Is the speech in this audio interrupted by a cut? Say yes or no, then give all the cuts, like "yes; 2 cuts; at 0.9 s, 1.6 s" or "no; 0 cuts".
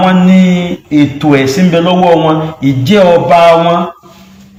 no; 0 cuts